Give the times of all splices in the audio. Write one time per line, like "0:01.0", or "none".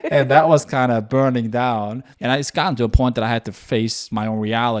0:02.1